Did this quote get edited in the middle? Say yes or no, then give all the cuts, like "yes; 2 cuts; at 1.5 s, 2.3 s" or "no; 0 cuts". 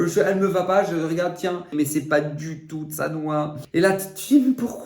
yes; 2 cuts; at 1.7 s, 3.6 s